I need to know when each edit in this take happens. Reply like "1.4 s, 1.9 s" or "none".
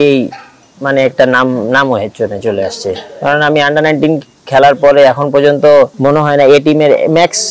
6.0 s